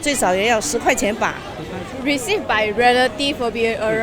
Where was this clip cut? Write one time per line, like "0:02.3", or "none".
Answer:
0:01.9